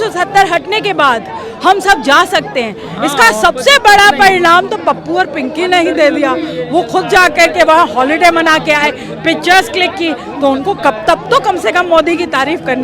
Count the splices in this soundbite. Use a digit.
0